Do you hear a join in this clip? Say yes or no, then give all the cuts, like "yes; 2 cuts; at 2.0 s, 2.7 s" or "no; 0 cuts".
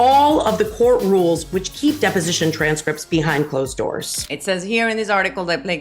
yes; 1 cut; at 4.2 s